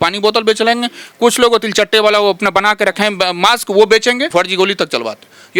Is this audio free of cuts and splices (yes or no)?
no